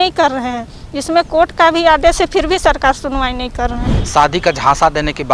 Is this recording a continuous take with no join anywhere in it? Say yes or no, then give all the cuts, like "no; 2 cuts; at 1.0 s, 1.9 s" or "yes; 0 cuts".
no; 1 cut; at 3.9 s